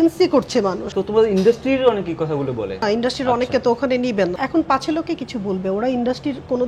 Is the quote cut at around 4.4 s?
yes; 3 cuts; at 0.9 s, 2.8 s, 4.4 s

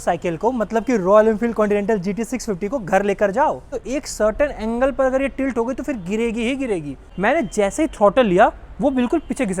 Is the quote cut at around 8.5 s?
no; 2 cuts; at 3.8 s, 7.0 s

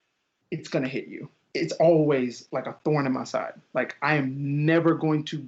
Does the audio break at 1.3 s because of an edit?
yes; 1 cut; at 1.3 s

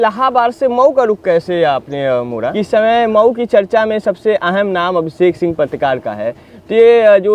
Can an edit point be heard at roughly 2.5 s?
yes; 1 cut; at 2.5 s

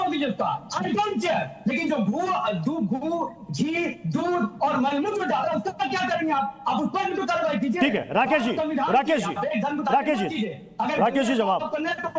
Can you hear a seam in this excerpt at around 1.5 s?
no; 0 cuts

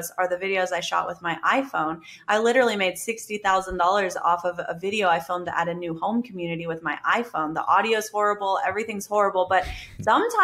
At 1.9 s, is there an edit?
no; 0 cuts

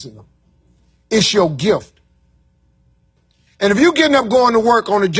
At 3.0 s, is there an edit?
yes; 1 cut; at 3.0 s

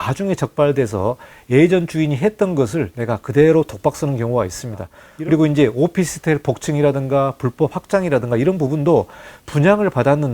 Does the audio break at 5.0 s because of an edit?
yes; 1 cut; at 5.0 s

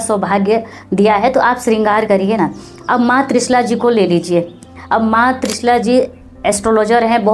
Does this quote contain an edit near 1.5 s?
no; 0 cuts

